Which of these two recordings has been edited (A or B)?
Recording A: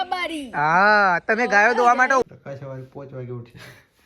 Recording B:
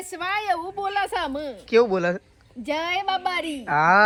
A